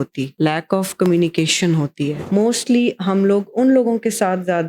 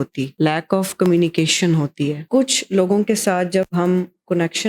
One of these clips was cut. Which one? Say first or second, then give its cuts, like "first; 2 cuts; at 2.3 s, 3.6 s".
first; 1 cut; at 2.2 s